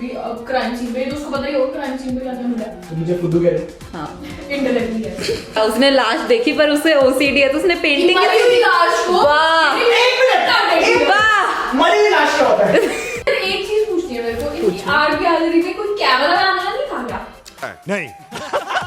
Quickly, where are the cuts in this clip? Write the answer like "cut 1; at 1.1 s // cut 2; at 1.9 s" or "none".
cut 1; at 5.6 s // cut 2; at 13.3 s